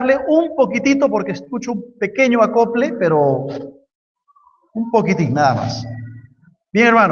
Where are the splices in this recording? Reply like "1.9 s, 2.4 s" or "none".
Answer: 2.8 s